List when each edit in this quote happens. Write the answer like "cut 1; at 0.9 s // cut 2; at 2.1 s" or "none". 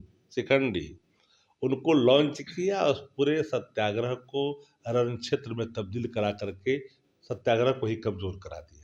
none